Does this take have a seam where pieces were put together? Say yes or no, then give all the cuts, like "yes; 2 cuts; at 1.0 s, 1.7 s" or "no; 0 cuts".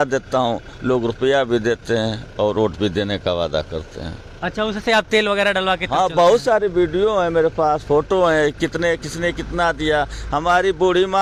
no; 0 cuts